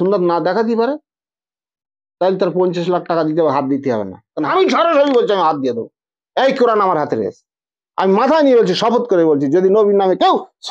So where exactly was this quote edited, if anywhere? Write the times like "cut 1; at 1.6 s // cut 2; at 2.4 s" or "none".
cut 1; at 4.5 s